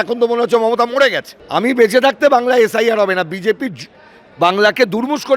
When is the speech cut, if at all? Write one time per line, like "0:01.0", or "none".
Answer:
0:01.3

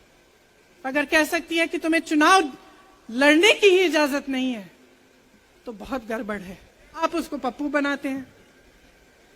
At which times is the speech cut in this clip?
0:07.0

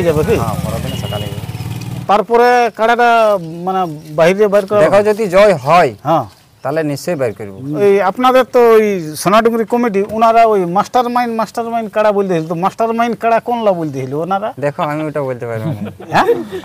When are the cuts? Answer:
0:02.0
0:07.7

